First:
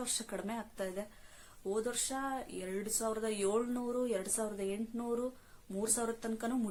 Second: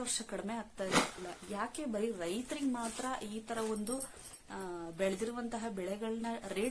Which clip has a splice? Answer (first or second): second